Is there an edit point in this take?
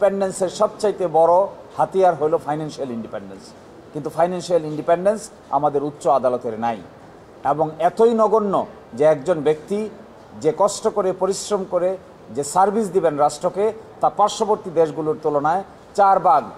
no; 0 cuts

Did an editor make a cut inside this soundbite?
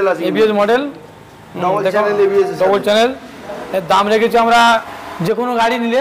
yes; 1 cut; at 5.0 s

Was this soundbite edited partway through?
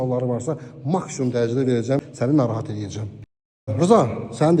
yes; 2 cuts; at 2.0 s, 3.6 s

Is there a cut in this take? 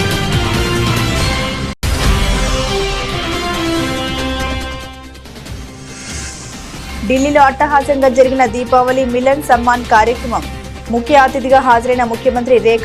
no; 0 cuts

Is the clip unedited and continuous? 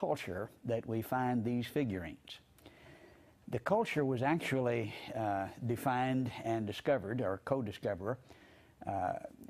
yes; 0 cuts

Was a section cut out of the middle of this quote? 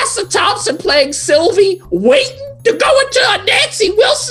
no; 0 cuts

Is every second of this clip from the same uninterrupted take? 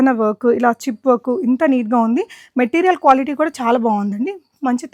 yes; 0 cuts

